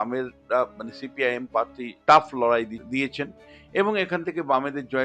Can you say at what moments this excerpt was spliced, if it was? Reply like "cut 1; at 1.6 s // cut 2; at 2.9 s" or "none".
cut 1; at 1.9 s // cut 2; at 2.8 s